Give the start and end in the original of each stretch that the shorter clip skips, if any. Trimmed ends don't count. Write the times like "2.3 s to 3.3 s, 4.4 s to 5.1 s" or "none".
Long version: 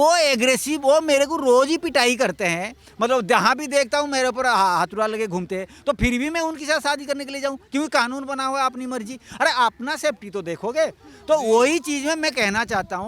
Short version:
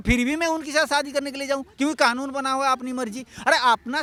none

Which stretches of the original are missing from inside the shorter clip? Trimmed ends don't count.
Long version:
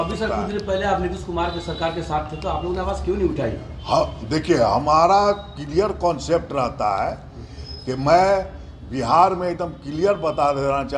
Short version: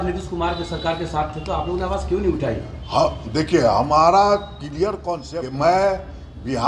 6.1 s to 7.6 s

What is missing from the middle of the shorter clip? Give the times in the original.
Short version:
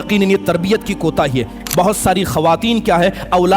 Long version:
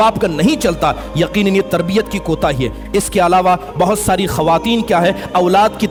2.9 s to 3.6 s

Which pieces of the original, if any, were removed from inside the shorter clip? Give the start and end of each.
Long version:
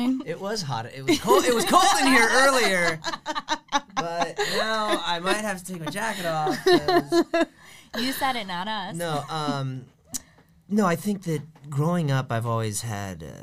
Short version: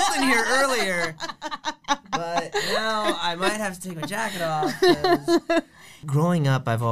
7.8 s to 11.6 s

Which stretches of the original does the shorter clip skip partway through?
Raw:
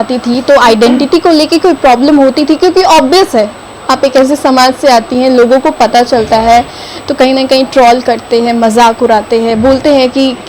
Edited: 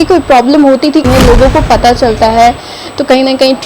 2.6 s to 5.1 s

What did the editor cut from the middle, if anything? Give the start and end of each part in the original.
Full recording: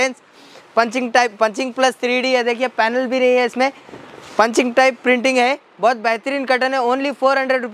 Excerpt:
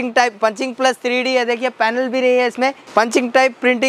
3.8 s to 4.2 s

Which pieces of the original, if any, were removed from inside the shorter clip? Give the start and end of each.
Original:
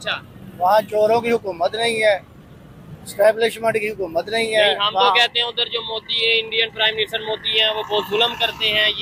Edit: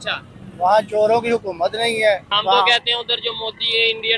2.3 s to 4.8 s

